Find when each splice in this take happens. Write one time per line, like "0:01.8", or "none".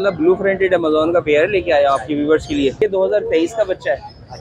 0:02.8

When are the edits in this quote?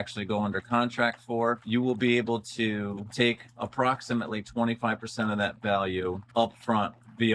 0:01.6
0:03.0
0:06.2

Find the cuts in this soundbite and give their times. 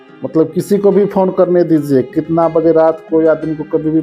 none

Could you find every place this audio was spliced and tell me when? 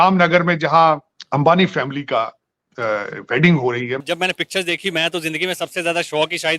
0:01.1
0:04.0

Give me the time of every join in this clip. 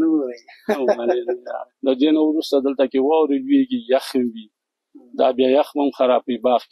0:01.7

